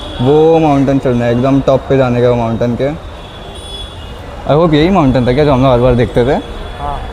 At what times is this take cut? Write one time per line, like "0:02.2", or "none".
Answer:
none